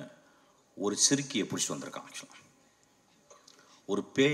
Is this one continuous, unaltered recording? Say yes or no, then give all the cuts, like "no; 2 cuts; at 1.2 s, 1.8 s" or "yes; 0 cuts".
yes; 0 cuts